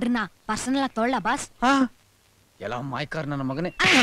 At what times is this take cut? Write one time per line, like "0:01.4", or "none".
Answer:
none